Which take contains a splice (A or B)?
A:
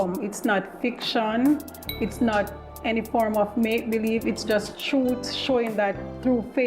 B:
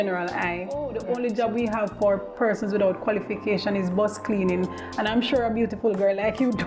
B